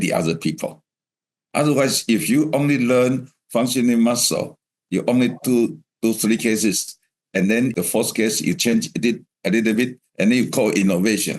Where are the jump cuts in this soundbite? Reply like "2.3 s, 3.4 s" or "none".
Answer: 7.7 s